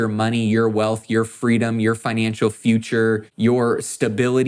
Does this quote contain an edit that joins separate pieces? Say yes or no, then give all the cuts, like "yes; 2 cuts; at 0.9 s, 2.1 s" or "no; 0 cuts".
yes; 1 cut; at 3.3 s